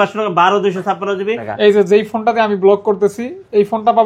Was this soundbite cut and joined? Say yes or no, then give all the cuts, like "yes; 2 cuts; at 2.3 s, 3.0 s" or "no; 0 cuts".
yes; 1 cut; at 1.5 s